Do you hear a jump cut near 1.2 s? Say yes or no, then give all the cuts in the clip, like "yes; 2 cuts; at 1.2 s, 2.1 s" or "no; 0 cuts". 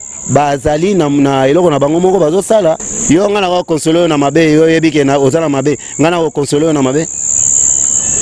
no; 1 cut; at 2.9 s